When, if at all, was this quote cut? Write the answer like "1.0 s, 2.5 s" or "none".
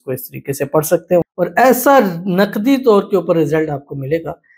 1.3 s

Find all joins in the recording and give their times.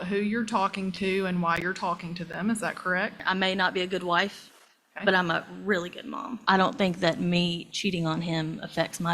3.2 s, 6.4 s

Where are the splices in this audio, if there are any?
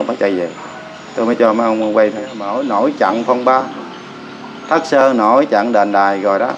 2.4 s

